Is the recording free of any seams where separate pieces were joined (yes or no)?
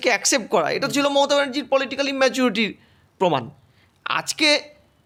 yes